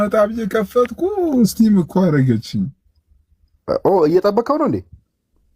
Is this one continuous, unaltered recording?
yes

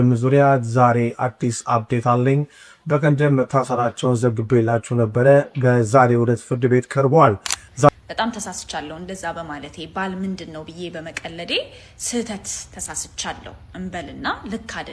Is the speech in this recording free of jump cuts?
no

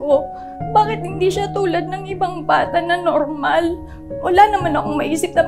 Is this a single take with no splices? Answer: yes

